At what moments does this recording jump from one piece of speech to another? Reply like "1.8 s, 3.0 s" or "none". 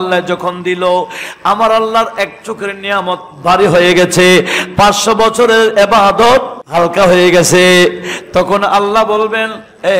6.6 s